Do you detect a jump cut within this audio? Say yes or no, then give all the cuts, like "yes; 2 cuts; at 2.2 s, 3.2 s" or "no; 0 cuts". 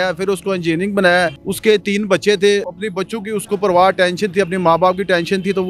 yes; 2 cuts; at 1.4 s, 2.8 s